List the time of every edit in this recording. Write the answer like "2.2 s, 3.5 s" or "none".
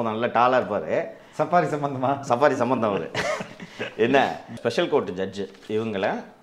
4.5 s